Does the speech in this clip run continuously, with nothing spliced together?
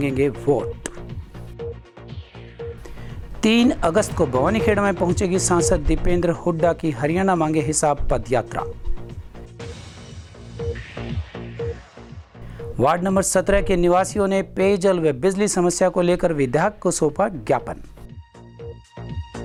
yes; 0 cuts

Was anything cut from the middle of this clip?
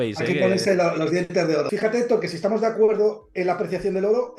yes; 1 cut; at 1.7 s

